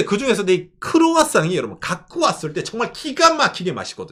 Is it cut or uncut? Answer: uncut